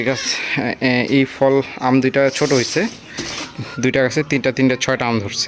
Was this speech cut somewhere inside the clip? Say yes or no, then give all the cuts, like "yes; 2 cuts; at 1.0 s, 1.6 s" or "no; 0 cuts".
no; 0 cuts